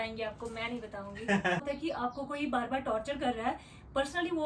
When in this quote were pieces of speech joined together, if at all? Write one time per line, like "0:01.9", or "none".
0:01.6